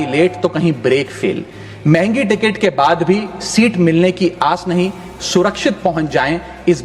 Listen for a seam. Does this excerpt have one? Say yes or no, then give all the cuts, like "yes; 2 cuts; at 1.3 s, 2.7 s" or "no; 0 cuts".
no; 0 cuts